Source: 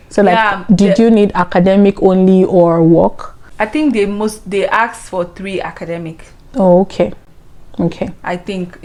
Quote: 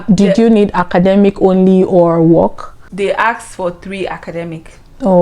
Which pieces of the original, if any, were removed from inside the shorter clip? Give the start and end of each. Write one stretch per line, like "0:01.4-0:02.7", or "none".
0:03.5-0:04.4